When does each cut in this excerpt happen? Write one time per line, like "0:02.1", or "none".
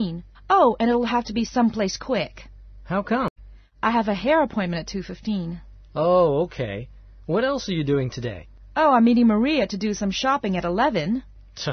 0:01.3